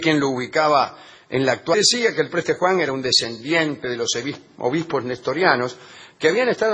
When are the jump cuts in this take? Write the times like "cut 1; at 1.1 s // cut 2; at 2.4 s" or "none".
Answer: none